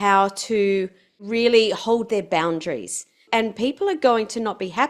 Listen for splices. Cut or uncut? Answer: cut